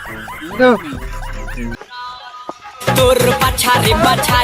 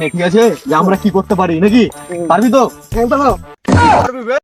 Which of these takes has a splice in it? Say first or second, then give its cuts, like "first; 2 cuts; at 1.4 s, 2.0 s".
first; 1 cut; at 1.8 s